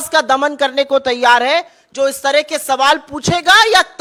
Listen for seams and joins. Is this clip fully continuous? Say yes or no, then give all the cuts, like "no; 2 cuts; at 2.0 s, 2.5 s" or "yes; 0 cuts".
yes; 0 cuts